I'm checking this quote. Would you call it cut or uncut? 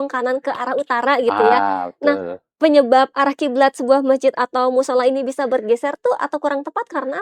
uncut